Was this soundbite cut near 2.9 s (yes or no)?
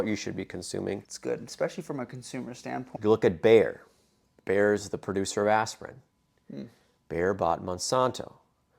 yes